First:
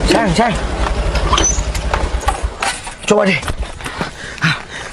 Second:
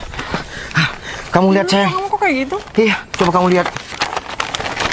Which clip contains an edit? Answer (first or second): second